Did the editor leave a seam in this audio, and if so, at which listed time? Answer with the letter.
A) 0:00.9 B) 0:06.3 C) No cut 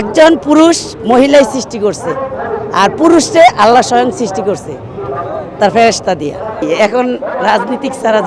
C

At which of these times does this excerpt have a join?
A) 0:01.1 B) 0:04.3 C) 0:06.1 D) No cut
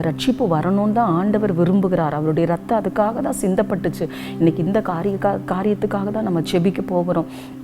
D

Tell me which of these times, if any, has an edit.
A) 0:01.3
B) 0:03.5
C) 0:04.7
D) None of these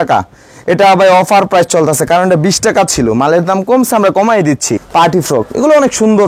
C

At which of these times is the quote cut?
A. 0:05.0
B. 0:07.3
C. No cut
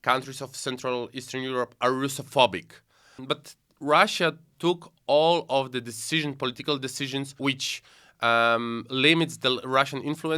B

